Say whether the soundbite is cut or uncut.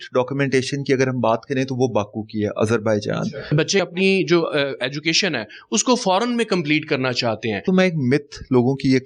cut